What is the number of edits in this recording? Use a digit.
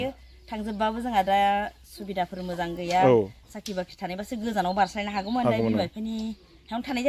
0